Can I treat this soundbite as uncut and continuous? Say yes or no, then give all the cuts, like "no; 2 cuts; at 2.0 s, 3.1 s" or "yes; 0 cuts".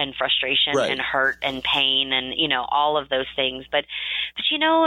yes; 0 cuts